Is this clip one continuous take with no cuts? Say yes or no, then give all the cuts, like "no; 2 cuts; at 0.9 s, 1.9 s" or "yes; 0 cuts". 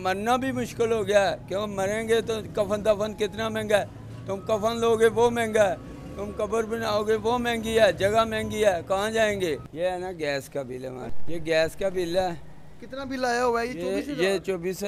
no; 2 cuts; at 9.7 s, 11.2 s